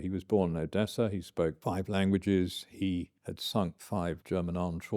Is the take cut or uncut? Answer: cut